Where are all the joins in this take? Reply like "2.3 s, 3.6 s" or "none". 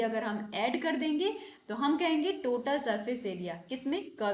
none